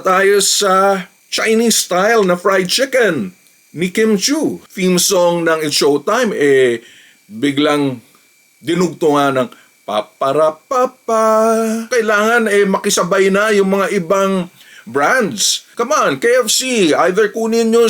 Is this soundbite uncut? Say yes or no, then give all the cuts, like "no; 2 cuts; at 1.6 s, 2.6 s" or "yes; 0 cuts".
no; 3 cuts; at 4.6 s, 11.9 s, 15.7 s